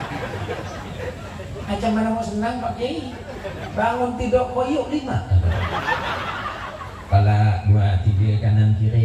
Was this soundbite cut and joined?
no; 0 cuts

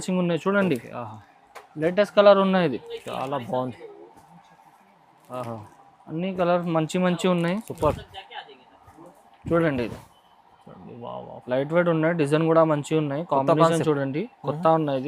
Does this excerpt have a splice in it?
yes; 1 cut; at 9.3 s

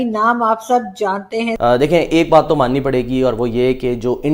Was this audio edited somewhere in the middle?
yes; 1 cut; at 1.5 s

